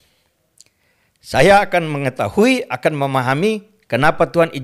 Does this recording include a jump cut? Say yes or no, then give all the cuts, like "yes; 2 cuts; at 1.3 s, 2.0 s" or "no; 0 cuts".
no; 0 cuts